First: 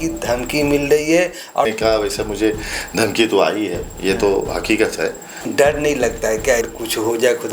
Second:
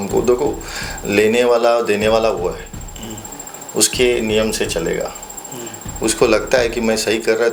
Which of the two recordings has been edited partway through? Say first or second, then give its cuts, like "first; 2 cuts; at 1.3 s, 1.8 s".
first; 3 cuts; at 1.6 s, 5.5 s, 6.7 s